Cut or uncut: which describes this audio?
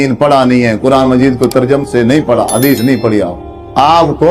uncut